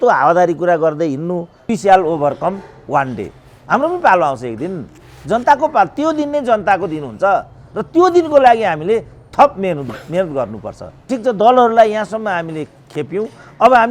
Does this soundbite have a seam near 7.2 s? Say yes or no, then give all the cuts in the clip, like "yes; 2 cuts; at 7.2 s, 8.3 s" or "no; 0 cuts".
no; 2 cuts; at 1.7 s, 11.1 s